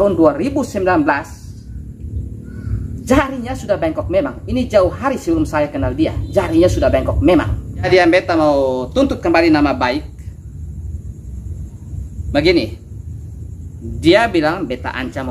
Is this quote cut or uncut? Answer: cut